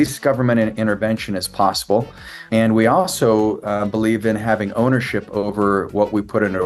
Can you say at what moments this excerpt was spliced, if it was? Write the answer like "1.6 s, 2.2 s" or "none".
2.3 s